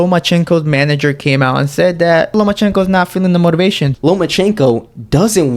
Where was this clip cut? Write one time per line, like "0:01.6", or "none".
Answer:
0:02.3
0:03.9